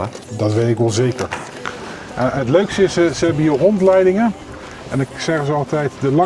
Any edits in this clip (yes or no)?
yes